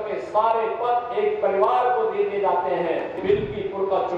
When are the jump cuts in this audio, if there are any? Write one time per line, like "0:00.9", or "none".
0:03.2